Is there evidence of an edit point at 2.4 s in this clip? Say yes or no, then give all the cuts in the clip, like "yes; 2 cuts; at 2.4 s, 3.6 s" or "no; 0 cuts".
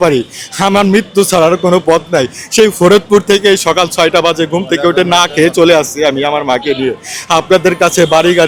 no; 0 cuts